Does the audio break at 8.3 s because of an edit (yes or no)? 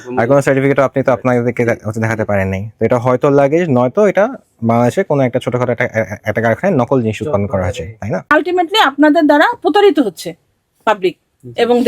yes